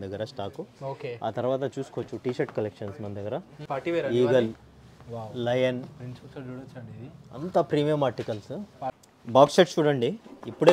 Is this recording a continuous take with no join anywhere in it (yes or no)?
no